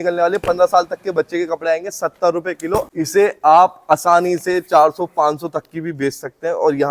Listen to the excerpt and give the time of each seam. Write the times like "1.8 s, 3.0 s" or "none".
2.9 s